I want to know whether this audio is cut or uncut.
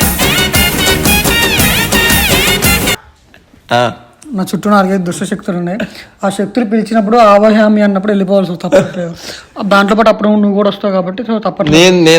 uncut